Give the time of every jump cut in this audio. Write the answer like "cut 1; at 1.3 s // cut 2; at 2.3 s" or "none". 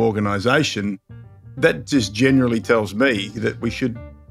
cut 1; at 1.5 s // cut 2; at 3.4 s